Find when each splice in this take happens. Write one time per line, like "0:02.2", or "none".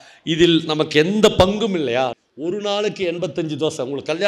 0:02.2

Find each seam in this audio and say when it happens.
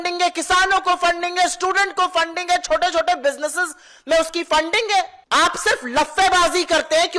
0:05.2

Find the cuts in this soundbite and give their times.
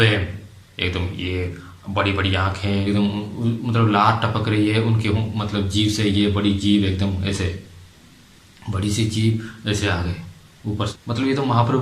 0:02.8
0:10.7

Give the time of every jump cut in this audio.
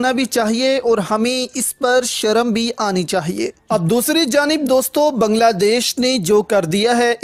0:03.6

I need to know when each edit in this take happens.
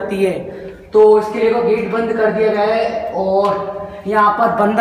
none

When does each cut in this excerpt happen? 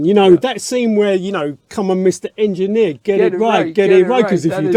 none

